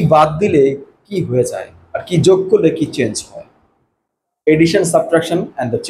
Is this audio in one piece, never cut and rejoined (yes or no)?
yes